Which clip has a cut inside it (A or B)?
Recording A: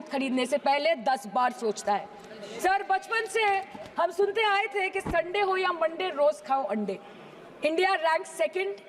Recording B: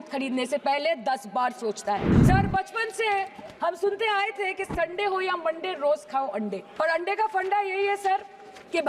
B